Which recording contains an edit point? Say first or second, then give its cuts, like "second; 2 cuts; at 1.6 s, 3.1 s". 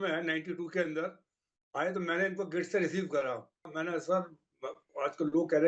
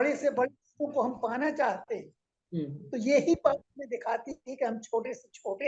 first; 1 cut; at 3.7 s